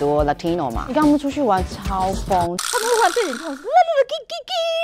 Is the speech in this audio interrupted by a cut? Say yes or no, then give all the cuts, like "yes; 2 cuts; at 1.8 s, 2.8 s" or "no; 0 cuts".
yes; 1 cut; at 0.9 s